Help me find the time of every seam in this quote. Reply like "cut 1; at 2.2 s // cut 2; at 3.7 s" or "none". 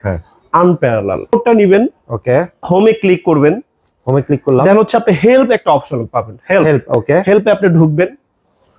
cut 1; at 1.3 s